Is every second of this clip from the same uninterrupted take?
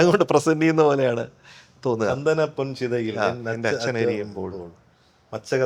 yes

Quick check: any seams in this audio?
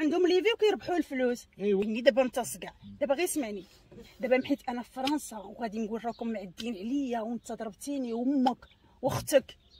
no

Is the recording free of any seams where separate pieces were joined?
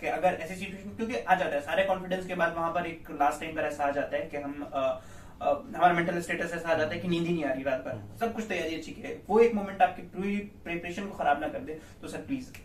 yes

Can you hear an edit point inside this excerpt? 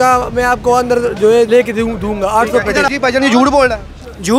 yes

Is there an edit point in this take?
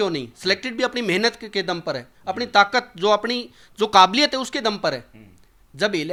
no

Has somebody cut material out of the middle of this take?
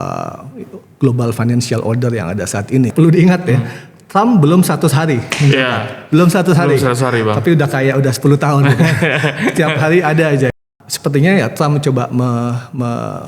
yes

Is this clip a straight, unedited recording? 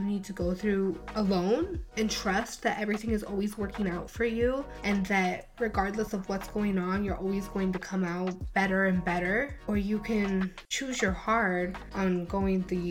yes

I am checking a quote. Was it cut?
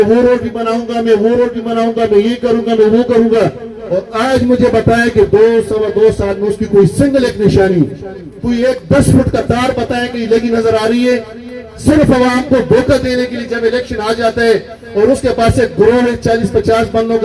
no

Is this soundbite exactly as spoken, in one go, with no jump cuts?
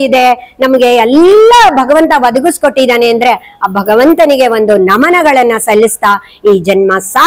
yes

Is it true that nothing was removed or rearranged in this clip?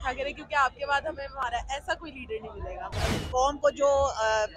no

